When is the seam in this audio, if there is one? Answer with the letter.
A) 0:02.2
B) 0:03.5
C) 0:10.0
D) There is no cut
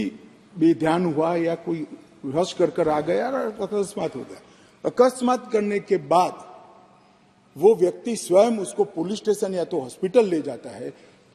D